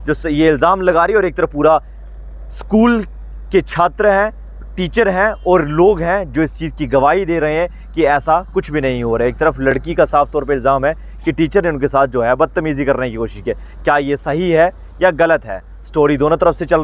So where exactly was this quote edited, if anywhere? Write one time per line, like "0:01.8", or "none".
none